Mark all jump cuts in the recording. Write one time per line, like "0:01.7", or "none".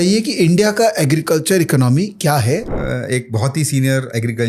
0:02.7